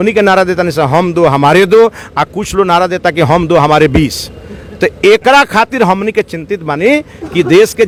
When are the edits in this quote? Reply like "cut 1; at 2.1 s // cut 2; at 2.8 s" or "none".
none